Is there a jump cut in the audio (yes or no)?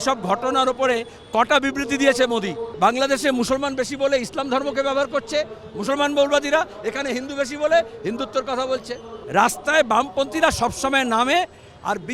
yes